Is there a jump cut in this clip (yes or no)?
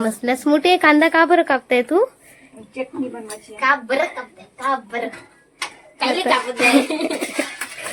no